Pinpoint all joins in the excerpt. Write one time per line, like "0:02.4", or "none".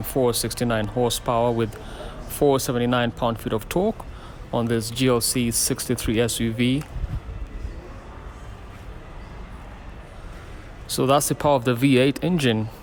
none